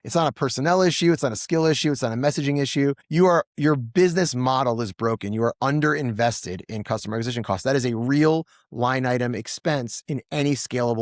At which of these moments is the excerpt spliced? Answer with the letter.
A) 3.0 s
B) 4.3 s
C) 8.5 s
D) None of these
A